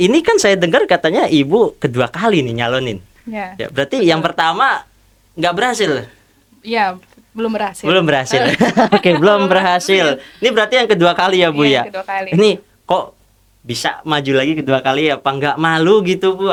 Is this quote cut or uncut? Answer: uncut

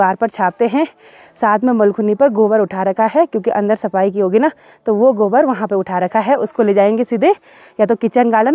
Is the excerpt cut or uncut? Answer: uncut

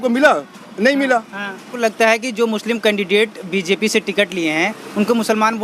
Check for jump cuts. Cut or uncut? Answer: cut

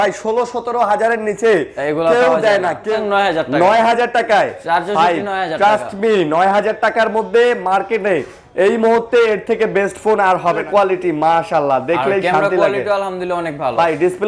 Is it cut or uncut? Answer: cut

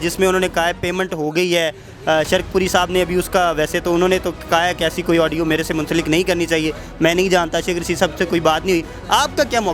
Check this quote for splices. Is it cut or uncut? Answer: uncut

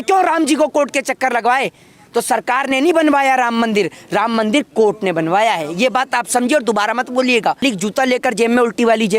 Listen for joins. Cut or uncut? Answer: cut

